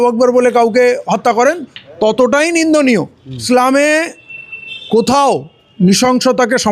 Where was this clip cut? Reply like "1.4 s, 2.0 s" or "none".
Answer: 3.4 s